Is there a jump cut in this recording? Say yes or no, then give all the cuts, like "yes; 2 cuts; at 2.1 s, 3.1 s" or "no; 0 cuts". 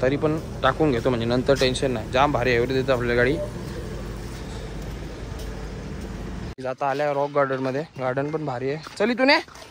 yes; 1 cut; at 6.5 s